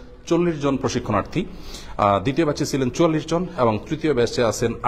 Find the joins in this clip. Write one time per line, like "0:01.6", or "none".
none